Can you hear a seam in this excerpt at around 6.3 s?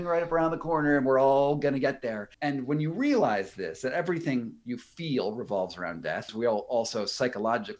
yes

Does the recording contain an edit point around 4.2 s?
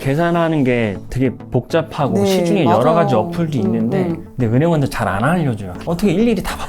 yes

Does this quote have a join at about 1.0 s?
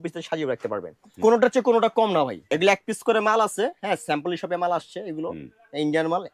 yes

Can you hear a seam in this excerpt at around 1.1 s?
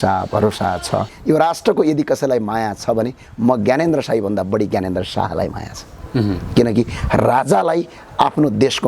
yes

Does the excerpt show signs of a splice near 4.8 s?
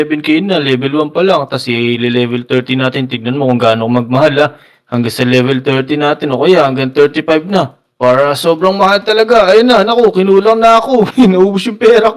no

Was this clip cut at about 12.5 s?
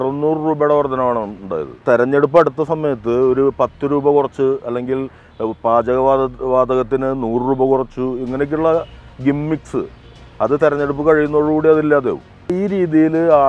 yes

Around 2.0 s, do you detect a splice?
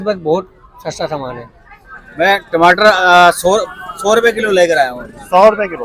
yes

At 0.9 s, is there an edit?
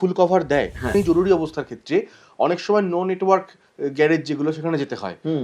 yes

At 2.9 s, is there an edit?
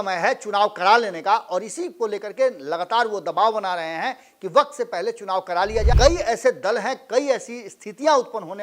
no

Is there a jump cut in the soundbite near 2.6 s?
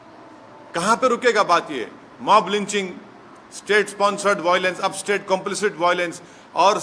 no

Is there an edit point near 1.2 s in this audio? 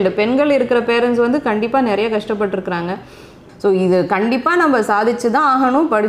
no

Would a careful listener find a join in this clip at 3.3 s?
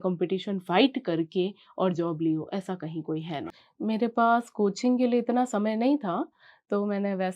yes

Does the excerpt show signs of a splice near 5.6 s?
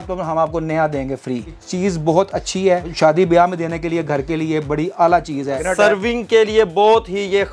yes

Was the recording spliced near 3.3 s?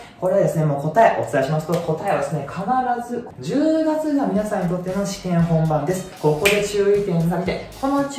yes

